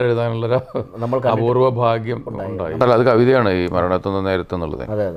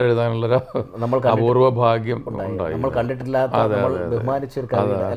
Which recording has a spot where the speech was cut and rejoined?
first; 1 cut; at 2.8 s

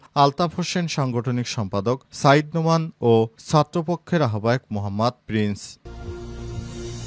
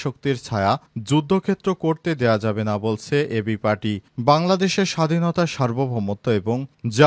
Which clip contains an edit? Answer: first; 1 cut; at 5.8 s

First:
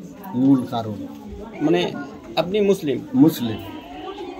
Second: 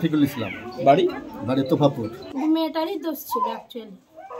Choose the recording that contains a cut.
second; 1 cut; at 2.2 s

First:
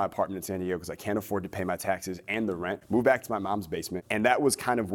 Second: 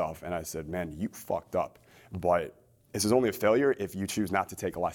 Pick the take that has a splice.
first; 2 cuts; at 2.8 s, 4.0 s

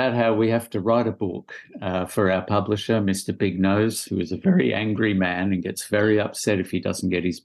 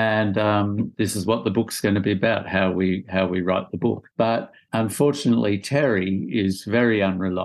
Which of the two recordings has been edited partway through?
second; 2 cuts; at 0.9 s, 4.2 s

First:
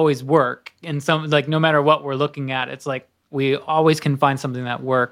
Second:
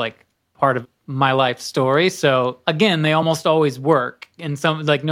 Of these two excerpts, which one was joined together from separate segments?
second; 2 cuts; at 0.9 s, 2.6 s

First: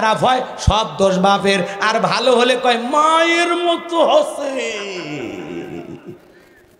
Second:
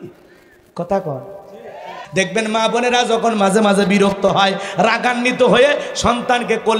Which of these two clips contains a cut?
second; 1 cut; at 2.0 s

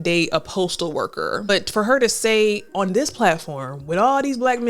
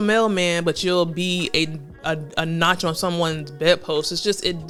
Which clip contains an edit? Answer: first; 1 cut; at 1.5 s

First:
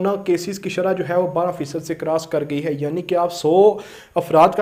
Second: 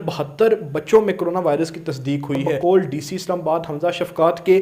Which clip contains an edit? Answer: second; 1 cut; at 2.5 s

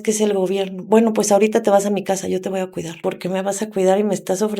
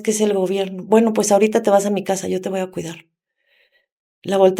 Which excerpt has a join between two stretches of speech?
first; 1 cut; at 2.9 s

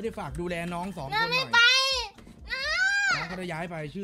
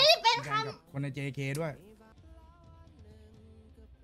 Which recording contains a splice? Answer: second; 1 cut; at 2.1 s

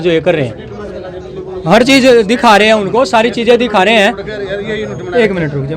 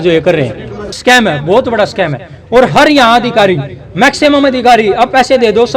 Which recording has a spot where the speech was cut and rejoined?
second; 1 cut; at 1.0 s

